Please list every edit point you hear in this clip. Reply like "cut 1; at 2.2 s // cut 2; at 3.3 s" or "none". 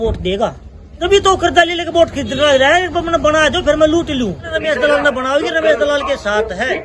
cut 1; at 0.9 s // cut 2; at 4.5 s

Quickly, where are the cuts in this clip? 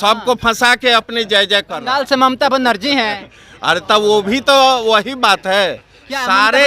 cut 1; at 1.8 s

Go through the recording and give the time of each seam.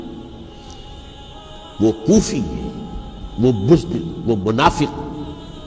none

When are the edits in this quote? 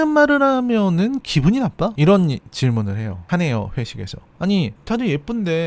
none

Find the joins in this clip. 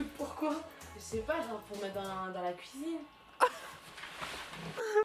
none

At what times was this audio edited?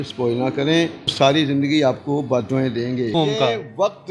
cut 1; at 1.1 s // cut 2; at 3.2 s

